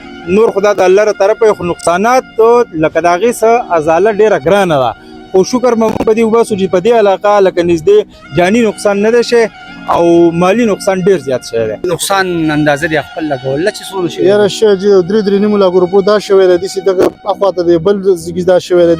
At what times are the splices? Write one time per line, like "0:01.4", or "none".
0:11.8